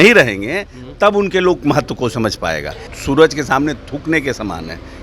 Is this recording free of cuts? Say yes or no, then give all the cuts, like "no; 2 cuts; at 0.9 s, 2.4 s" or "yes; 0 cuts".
no; 1 cut; at 2.9 s